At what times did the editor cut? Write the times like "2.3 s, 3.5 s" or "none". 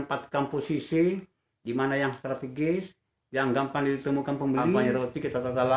4.8 s